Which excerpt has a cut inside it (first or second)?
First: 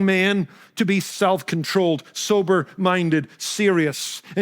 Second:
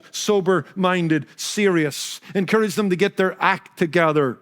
first